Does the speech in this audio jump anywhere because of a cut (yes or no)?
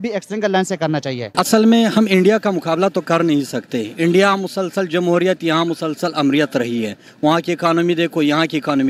yes